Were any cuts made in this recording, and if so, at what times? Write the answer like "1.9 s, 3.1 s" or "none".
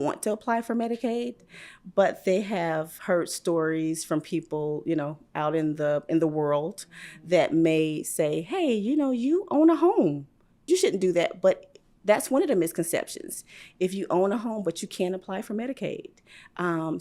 10.6 s